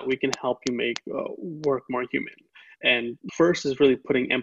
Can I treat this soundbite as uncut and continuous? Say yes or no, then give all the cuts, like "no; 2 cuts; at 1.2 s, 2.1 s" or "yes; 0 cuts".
no; 1 cut; at 3.2 s